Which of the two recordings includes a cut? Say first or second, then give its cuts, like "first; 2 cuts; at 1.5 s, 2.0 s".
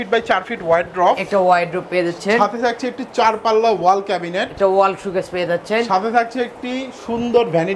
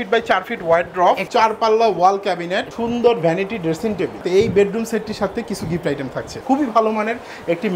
second; 4 cuts; at 1.2 s, 2.7 s, 4.2 s, 6.4 s